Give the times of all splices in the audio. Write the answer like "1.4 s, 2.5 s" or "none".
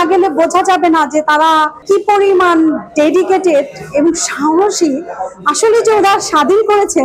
none